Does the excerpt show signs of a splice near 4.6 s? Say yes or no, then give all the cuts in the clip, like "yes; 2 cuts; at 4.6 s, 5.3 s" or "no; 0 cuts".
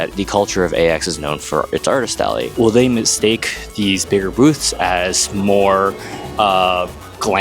no; 1 cut; at 2.5 s